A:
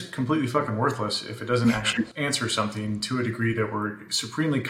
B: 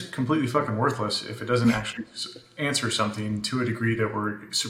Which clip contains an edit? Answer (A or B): A